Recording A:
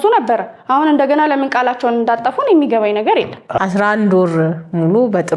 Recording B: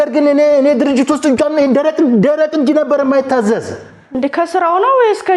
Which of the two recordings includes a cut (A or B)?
A